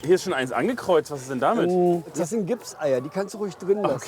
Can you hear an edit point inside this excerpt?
yes; 1 cut; at 2.1 s

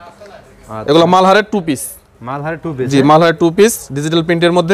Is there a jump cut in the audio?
no; 0 cuts

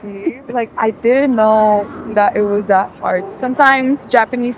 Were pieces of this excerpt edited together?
yes; 1 cut; at 3.3 s

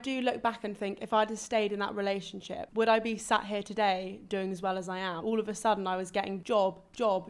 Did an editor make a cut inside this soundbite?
yes; 3 cuts; at 2.6 s, 5.2 s, 6.4 s

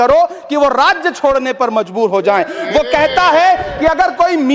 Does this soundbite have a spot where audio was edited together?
no; 0 cuts

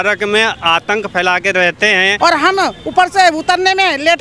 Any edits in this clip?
yes; 1 cut; at 2.1 s

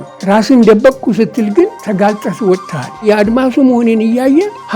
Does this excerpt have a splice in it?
yes; 2 cuts; at 1.8 s, 3.0 s

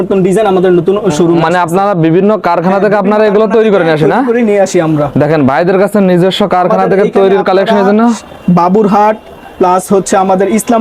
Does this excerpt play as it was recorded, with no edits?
yes; 0 cuts

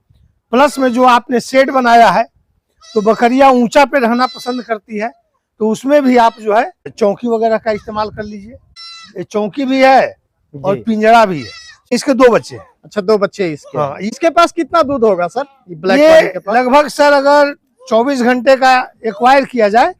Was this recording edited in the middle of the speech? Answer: yes; 2 cuts; at 6.8 s, 11.8 s

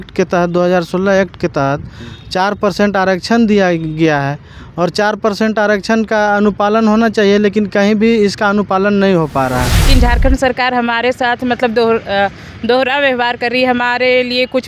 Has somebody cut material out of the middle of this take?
yes; 1 cut; at 9.9 s

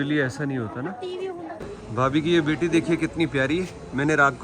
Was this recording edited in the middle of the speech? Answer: yes; 1 cut; at 1.6 s

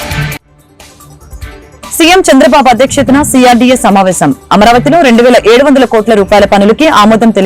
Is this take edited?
yes; 1 cut; at 2.0 s

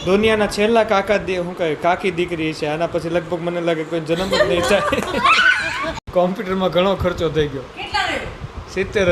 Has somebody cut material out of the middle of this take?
yes; 1 cut; at 5.9 s

